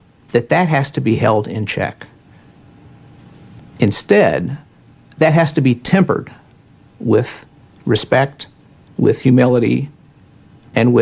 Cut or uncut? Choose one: cut